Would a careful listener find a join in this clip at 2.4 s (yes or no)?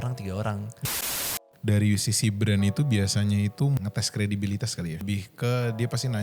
no